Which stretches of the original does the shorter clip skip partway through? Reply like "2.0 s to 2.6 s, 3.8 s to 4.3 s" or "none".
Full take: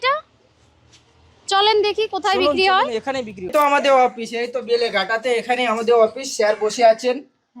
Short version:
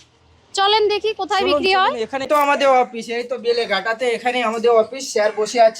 2.7 s to 3.0 s